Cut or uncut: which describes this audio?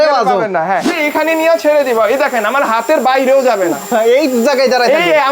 cut